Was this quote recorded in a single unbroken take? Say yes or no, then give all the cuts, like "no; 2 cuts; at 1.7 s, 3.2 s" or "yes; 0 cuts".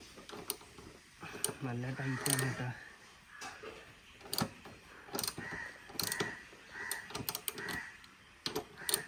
yes; 0 cuts